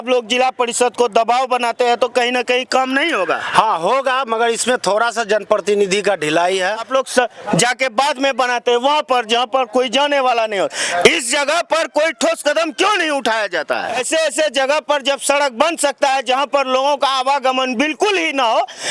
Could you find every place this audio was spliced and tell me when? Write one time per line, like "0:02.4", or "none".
0:06.8
0:14.0